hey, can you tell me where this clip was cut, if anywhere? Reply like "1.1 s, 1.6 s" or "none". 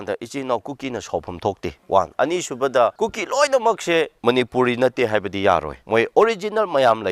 1.7 s, 2.9 s, 4.1 s, 5.8 s